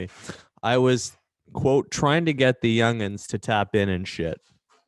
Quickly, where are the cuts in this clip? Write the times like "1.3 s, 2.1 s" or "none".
none